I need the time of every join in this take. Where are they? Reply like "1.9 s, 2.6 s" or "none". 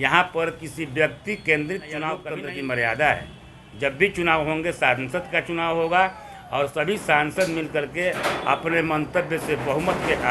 2.3 s